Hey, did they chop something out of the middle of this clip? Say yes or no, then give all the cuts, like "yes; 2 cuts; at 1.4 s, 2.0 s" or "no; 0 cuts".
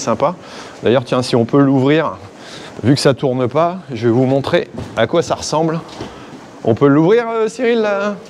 no; 0 cuts